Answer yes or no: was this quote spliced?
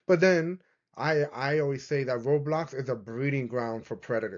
no